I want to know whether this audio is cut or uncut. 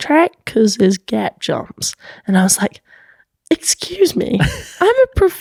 uncut